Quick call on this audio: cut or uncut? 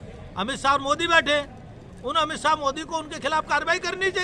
uncut